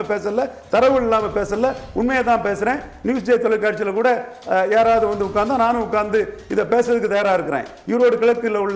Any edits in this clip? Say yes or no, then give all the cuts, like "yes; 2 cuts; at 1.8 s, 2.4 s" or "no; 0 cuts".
no; 0 cuts